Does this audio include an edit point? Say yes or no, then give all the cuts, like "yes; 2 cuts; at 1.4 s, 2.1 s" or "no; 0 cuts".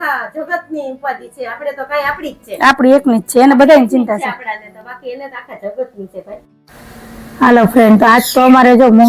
no; 0 cuts